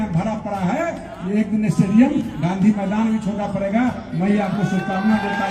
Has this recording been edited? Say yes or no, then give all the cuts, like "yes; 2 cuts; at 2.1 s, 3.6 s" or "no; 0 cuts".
no; 0 cuts